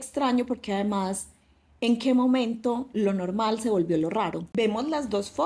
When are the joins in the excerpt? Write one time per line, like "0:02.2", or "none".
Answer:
0:04.5